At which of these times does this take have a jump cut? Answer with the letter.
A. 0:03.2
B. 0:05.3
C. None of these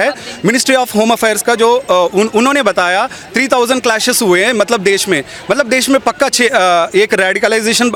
C